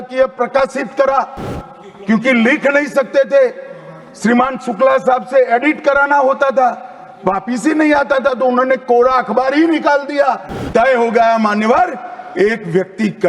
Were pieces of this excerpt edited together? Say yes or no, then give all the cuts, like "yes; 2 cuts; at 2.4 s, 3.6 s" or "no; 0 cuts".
yes; 1 cut; at 10.6 s